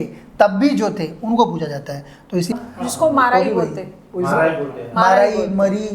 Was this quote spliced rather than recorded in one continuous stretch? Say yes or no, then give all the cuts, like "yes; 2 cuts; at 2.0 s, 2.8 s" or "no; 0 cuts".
yes; 1 cut; at 2.5 s